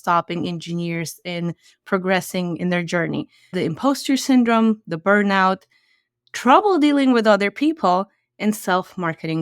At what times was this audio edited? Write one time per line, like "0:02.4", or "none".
0:03.5